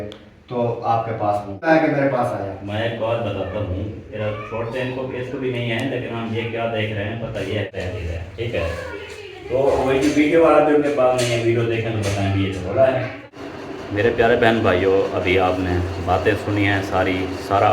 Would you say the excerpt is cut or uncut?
cut